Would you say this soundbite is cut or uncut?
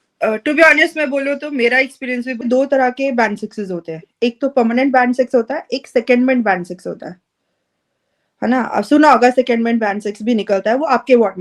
cut